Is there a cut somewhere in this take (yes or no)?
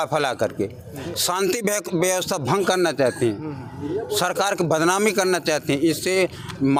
no